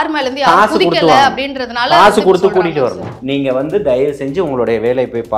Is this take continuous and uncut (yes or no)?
no